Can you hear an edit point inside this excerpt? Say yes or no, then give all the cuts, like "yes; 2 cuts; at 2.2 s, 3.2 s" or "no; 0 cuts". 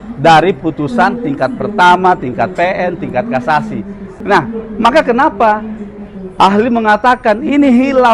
yes; 1 cut; at 4.1 s